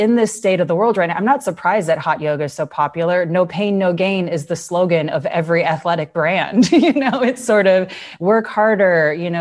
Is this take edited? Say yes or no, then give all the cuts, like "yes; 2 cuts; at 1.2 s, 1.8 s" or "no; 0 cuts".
no; 0 cuts